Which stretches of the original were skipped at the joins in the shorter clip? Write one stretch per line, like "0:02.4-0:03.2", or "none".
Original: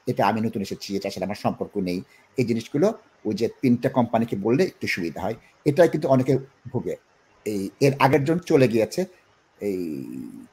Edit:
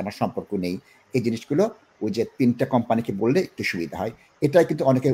none